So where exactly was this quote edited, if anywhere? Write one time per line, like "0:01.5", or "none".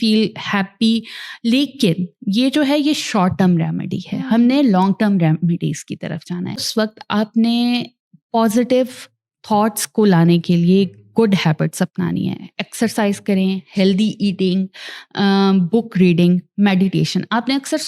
0:06.6